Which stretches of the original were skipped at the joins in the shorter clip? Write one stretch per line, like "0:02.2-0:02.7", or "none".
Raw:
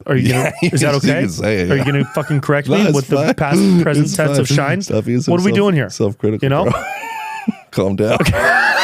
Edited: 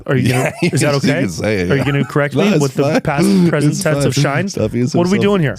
0:02.1-0:02.4

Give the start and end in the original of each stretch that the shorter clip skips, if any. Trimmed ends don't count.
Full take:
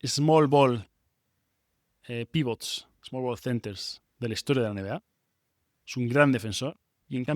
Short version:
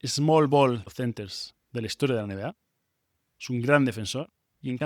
0:00.9-0:03.4

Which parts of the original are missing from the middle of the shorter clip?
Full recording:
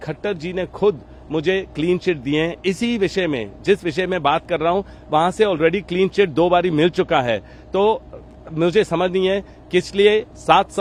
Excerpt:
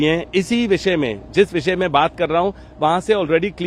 none

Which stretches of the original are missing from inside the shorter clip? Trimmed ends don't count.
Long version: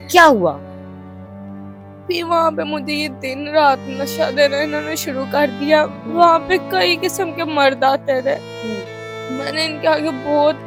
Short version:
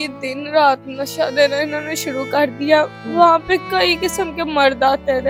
none

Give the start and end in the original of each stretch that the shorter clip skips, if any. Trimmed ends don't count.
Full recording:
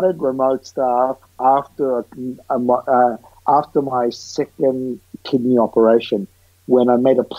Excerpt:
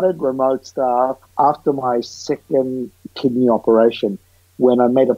0:01.2-0:03.3

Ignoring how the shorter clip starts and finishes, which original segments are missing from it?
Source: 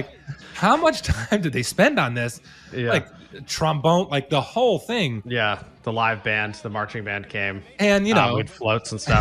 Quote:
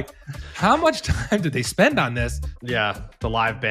0:02.6-0:05.2

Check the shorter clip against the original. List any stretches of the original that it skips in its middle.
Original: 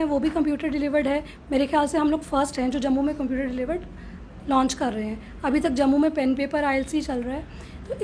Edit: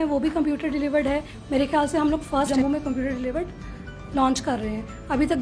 0:02.5-0:02.8

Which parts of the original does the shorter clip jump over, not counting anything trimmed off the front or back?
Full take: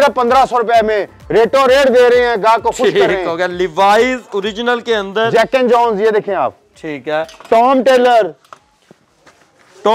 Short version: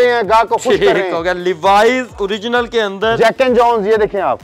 none

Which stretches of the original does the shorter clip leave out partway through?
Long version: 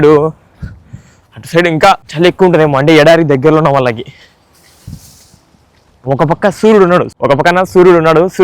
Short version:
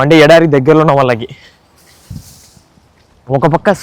none

